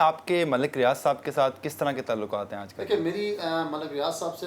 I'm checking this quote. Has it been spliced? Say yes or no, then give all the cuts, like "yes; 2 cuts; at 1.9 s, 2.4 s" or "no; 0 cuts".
no; 0 cuts